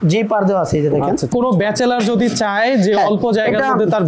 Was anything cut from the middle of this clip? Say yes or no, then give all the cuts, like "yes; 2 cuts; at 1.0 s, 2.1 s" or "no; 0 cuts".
yes; 1 cut; at 1.3 s